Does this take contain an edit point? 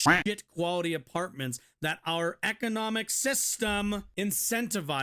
yes; 1 cut; at 4.1 s

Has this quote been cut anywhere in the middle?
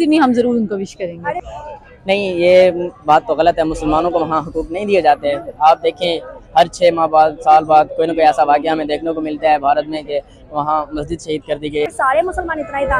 yes; 2 cuts; at 1.1 s, 11.9 s

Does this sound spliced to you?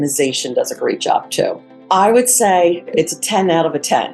yes; 2 cuts; at 1.7 s, 2.9 s

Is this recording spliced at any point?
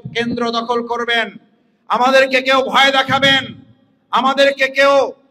no; 0 cuts

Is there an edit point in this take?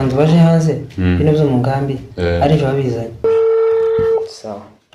yes; 1 cut; at 3.2 s

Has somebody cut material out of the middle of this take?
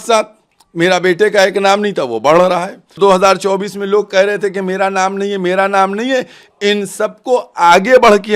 yes; 1 cut; at 3.0 s

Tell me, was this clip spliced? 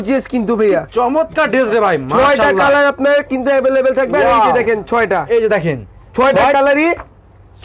no; 0 cuts

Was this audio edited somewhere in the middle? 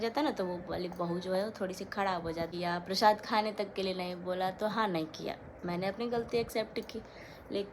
yes; 1 cut; at 2.5 s

